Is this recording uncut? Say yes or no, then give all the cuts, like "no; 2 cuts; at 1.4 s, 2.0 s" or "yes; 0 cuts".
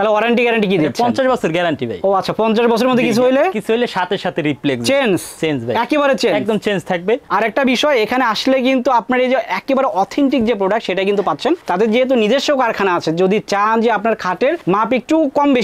no; 1 cut; at 7.2 s